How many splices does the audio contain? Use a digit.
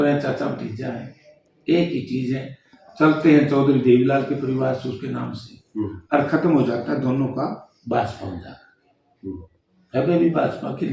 0